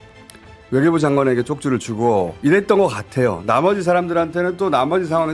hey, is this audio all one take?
yes; 0 cuts

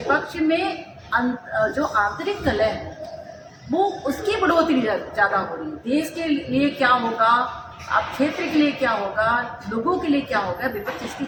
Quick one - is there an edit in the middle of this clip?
no; 0 cuts

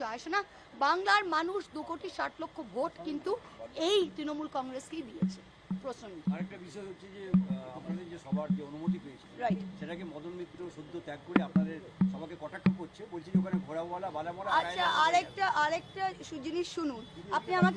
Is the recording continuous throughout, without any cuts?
yes; 0 cuts

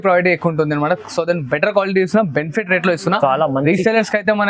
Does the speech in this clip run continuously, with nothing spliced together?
yes; 0 cuts

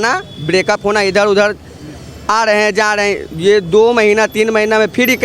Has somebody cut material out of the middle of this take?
no; 0 cuts

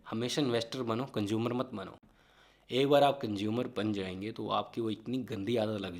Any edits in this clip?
no; 0 cuts

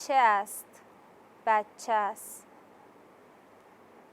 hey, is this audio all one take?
yes; 0 cuts

